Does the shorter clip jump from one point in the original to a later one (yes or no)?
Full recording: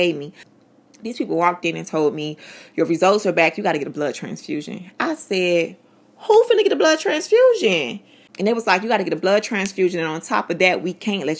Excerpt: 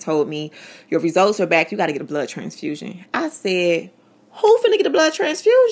no